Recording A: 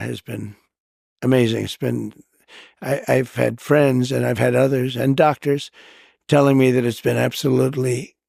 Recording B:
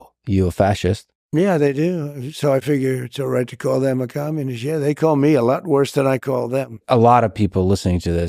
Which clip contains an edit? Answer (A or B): B